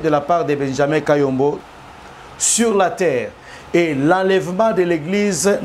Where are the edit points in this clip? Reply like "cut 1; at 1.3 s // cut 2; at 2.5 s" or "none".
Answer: cut 1; at 1.6 s